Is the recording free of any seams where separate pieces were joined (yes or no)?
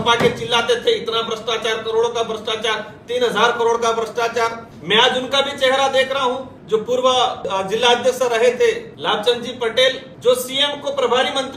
no